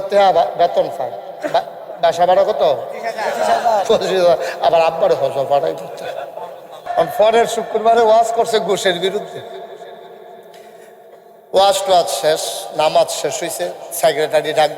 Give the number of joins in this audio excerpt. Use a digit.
1